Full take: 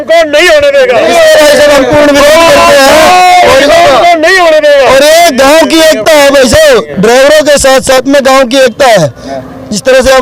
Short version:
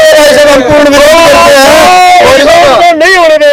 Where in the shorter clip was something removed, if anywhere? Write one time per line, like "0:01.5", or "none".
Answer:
none